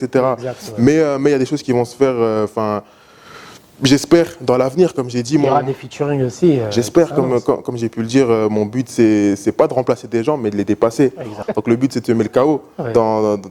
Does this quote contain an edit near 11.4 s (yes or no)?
yes